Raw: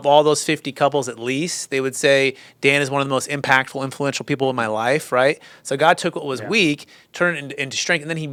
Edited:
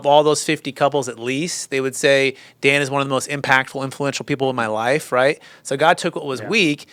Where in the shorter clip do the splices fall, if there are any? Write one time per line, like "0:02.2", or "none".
none